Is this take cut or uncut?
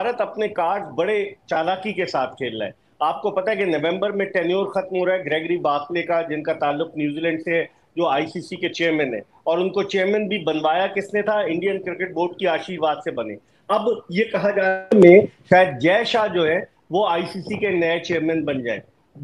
uncut